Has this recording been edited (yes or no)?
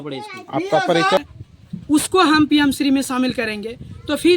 yes